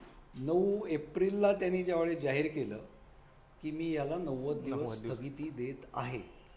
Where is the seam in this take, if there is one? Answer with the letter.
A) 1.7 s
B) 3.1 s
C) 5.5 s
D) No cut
D